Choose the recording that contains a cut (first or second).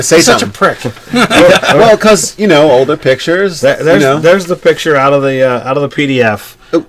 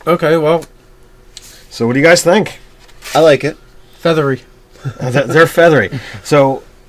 first